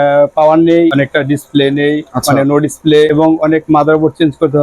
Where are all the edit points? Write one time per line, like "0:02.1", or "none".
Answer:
0:00.9
0:03.1